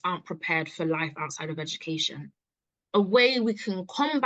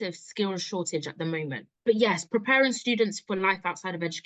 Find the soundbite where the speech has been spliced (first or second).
second